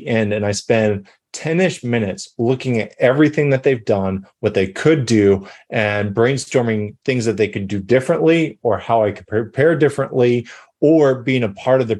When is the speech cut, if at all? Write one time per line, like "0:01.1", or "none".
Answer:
none